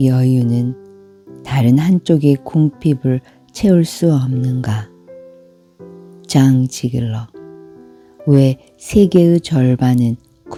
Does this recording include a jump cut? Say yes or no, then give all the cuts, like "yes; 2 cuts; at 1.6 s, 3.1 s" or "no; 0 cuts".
no; 0 cuts